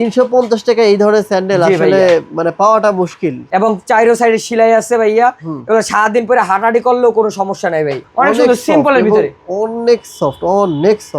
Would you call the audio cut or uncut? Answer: cut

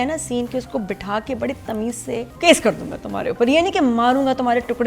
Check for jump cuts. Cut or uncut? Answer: cut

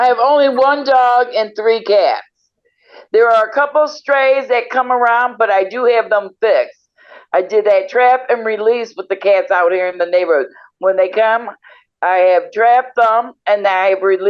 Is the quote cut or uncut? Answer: uncut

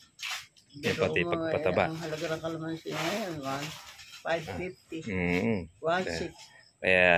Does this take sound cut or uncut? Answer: uncut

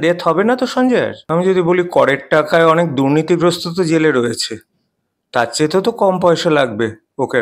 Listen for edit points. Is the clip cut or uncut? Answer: cut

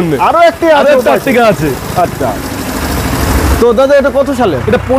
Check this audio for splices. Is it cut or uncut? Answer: uncut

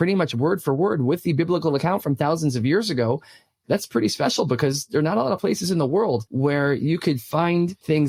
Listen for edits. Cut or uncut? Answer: uncut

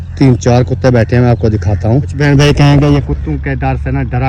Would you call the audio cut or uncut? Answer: cut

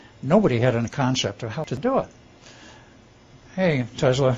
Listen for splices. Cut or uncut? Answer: cut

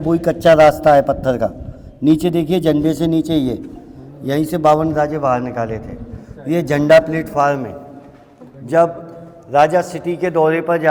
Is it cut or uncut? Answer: uncut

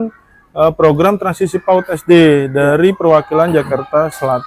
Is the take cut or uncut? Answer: uncut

